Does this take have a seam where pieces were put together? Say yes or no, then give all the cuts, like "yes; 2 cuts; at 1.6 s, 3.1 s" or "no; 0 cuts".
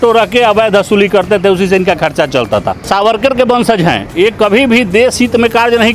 yes; 1 cut; at 2.8 s